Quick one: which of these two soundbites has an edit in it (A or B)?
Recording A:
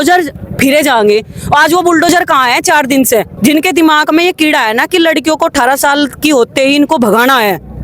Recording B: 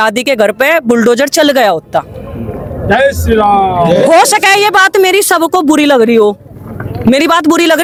A